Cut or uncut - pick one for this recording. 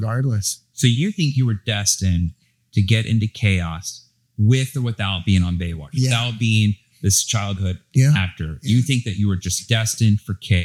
uncut